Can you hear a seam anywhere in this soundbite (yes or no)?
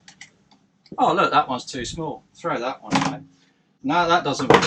yes